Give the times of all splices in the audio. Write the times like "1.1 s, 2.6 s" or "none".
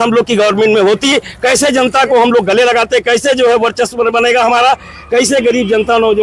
none